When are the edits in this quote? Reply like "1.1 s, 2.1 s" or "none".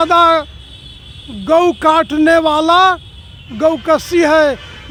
none